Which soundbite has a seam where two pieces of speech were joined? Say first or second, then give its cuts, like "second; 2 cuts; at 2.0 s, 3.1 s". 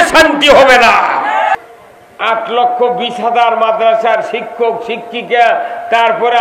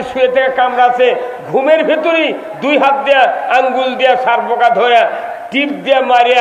first; 1 cut; at 1.6 s